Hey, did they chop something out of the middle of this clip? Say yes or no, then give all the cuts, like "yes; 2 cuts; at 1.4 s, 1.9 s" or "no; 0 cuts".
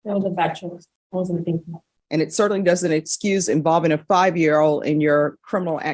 yes; 2 cuts; at 0.9 s, 1.9 s